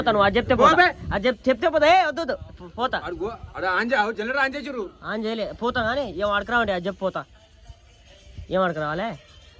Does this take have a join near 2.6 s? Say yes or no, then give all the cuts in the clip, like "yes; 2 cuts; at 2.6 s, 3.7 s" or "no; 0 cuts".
no; 0 cuts